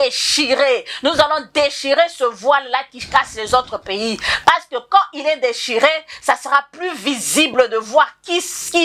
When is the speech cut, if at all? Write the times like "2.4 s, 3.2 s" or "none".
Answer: none